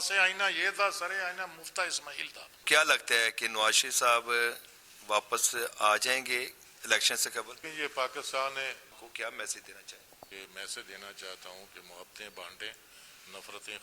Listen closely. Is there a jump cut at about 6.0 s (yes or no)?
no